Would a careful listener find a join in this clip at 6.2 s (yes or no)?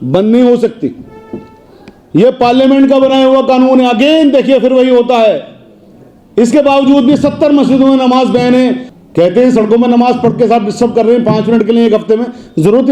no